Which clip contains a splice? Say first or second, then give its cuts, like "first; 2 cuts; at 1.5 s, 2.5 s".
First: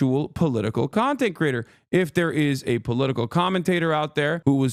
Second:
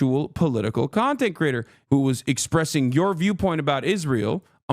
second; 1 cut; at 1.8 s